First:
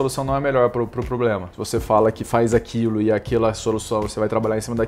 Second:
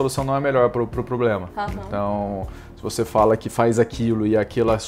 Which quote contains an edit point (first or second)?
first